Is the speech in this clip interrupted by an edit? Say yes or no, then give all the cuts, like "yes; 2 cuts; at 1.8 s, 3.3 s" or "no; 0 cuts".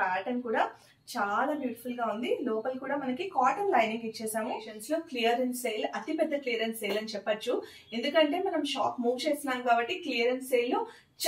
yes; 1 cut; at 4.7 s